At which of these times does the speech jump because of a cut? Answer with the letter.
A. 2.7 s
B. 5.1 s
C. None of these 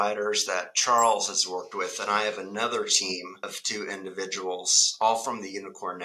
C